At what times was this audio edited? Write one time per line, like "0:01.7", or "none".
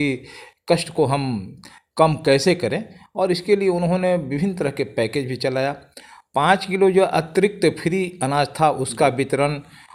none

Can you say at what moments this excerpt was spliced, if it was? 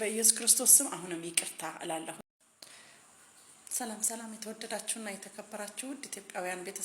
0:02.2

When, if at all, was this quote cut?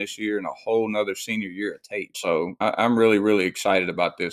0:02.6

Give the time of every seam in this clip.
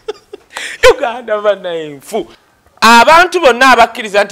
0:02.4

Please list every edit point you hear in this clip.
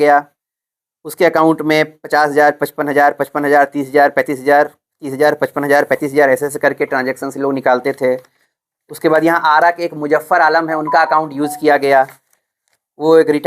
none

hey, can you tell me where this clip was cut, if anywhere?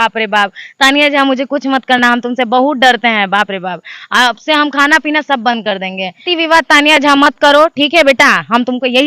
0:06.3

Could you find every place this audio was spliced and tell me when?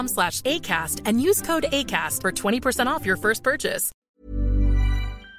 0:04.0

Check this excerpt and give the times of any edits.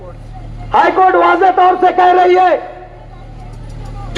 none

